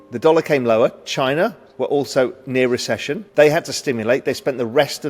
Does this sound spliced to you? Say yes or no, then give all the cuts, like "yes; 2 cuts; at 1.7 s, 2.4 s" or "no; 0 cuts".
yes; 1 cut; at 3.2 s